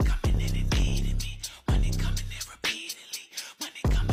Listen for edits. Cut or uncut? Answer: uncut